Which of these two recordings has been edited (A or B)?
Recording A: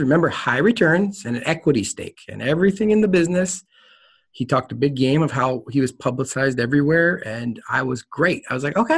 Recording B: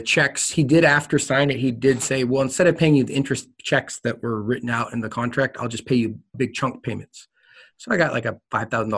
B